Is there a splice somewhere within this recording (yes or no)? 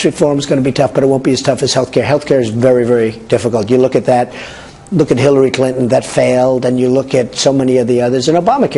no